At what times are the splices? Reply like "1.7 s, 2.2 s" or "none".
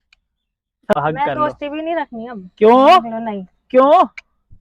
0.9 s